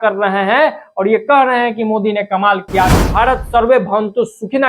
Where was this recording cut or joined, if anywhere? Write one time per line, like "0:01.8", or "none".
0:03.0